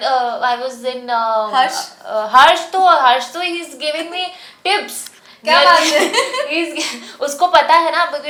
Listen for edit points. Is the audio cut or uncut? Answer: uncut